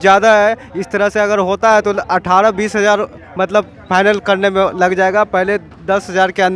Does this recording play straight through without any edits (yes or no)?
yes